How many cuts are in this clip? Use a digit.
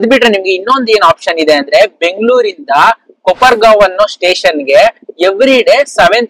0